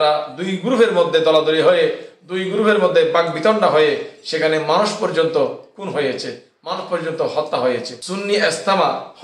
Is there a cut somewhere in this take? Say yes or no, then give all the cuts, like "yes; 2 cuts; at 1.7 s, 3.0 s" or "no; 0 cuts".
yes; 1 cut; at 8.0 s